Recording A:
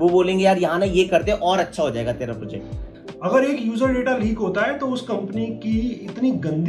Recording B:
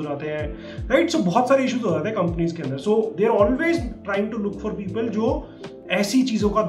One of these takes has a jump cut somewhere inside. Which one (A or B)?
A